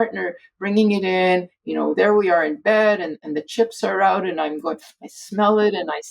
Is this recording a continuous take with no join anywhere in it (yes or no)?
yes